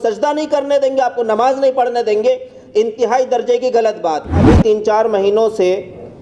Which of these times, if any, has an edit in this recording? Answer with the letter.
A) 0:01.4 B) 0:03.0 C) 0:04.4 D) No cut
C